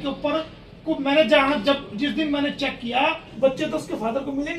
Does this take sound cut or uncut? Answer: cut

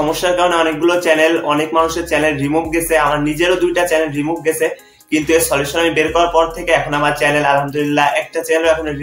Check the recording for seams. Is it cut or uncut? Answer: uncut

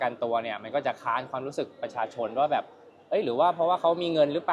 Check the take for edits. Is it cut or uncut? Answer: uncut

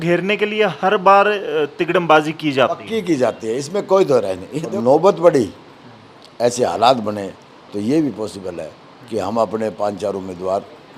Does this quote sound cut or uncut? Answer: cut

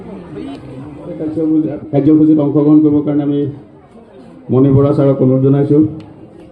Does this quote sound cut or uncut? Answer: cut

